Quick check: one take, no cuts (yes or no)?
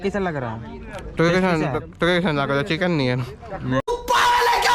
yes